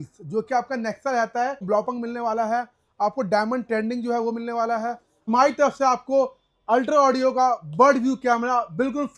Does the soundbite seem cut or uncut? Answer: cut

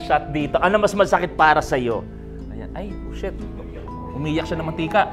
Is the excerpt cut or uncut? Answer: uncut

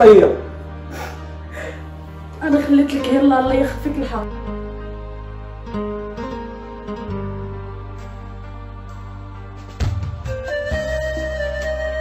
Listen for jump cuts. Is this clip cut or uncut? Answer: uncut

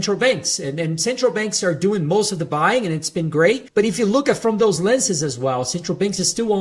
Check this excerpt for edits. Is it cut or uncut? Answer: cut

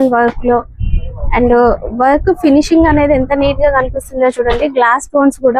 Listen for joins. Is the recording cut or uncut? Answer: uncut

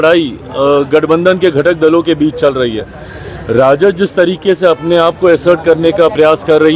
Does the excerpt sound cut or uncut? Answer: uncut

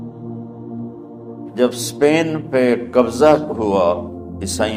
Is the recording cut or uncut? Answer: uncut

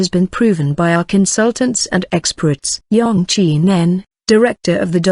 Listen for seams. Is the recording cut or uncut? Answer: cut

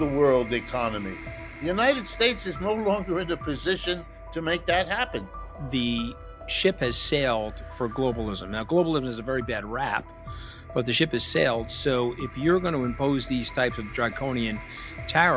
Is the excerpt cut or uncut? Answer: cut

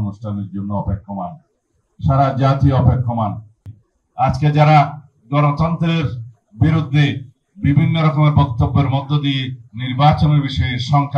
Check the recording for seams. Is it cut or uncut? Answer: cut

